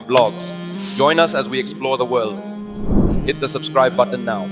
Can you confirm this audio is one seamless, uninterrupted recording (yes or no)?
yes